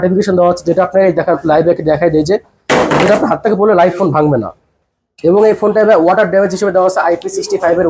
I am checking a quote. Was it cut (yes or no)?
no